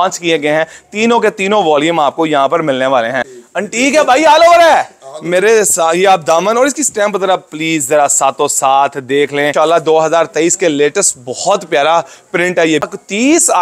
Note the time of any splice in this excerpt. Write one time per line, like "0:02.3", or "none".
0:03.3
0:09.5
0:12.9